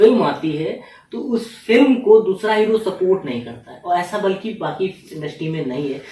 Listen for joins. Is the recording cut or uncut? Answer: uncut